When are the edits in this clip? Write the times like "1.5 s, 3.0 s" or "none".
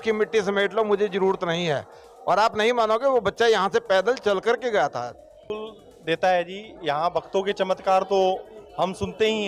5.4 s